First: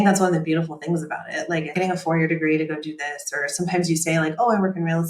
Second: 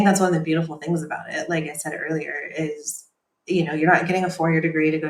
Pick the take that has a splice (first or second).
first